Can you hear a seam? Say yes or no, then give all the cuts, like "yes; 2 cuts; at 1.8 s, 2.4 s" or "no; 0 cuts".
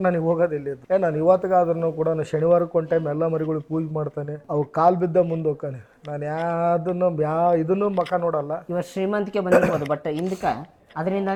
no; 0 cuts